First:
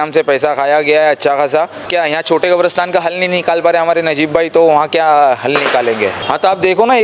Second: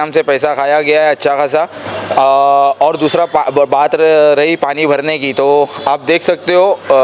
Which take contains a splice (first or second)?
first